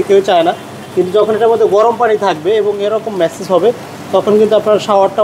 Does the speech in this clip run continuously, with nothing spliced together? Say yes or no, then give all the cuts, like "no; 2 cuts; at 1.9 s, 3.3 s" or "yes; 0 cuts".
yes; 0 cuts